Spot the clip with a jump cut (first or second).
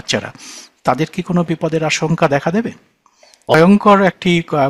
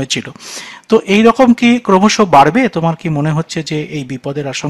first